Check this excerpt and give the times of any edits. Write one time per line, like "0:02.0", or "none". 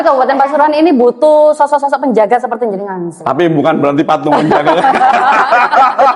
none